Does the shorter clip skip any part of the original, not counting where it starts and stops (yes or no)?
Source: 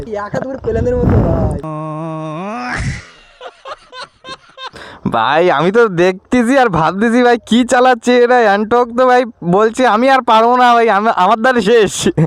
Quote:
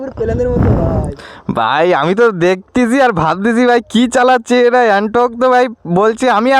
yes